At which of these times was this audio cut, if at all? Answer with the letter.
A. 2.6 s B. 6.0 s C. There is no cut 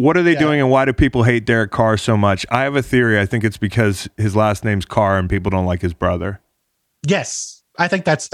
C